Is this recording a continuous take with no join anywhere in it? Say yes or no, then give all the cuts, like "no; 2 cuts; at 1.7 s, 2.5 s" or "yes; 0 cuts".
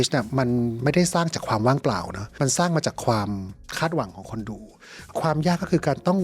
no; 1 cut; at 5.0 s